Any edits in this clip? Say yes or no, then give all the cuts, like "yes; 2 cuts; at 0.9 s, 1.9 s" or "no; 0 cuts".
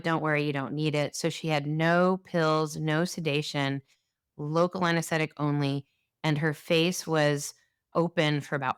no; 0 cuts